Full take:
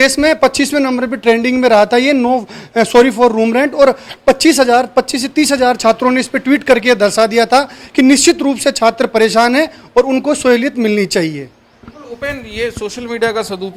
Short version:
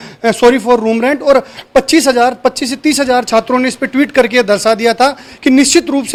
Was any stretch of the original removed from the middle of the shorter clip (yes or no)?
no